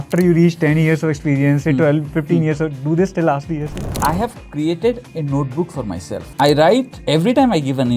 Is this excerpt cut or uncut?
cut